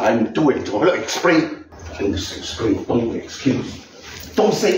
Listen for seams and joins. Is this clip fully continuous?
no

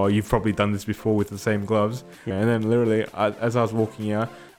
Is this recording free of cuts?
no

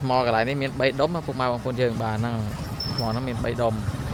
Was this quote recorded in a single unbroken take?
yes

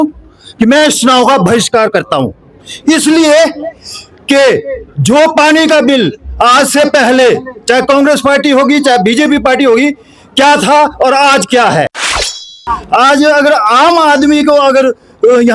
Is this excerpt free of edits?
no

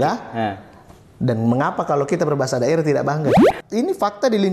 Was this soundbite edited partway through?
yes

